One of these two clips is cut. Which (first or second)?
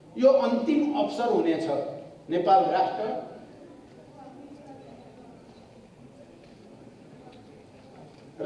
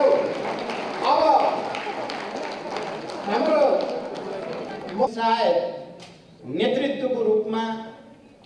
second